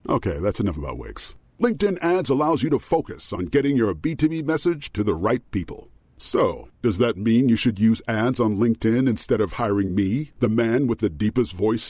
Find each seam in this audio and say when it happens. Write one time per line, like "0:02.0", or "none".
none